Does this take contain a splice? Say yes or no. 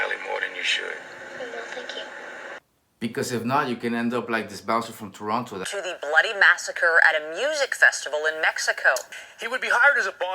yes